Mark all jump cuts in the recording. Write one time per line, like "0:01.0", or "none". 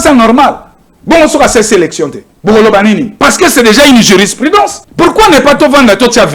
0:02.2
0:04.8